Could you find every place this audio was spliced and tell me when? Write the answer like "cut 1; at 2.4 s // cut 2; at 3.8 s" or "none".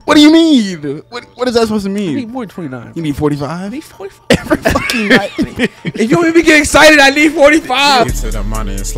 cut 1; at 8.1 s